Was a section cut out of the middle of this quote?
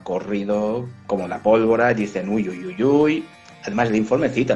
no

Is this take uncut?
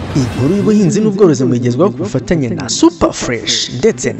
yes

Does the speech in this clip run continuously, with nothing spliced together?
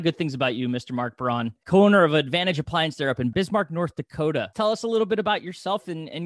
no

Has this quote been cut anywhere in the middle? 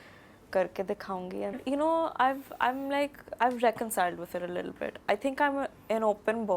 yes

